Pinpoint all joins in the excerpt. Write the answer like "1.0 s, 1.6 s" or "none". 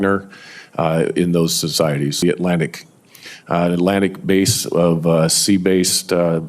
2.2 s